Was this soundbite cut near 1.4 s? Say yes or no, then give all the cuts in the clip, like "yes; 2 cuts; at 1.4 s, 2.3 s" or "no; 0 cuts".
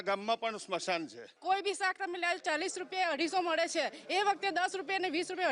yes; 1 cut; at 1.4 s